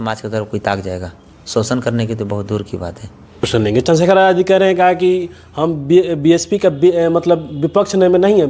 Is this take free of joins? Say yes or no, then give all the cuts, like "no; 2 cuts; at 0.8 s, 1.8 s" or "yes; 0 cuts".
yes; 0 cuts